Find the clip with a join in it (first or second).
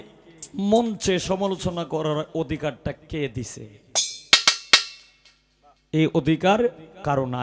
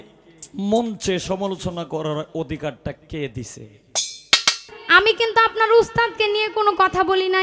second